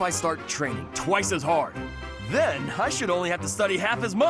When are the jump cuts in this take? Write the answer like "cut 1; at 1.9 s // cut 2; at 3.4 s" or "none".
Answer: none